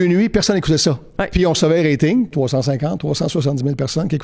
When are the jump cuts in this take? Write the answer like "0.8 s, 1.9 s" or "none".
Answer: 2.3 s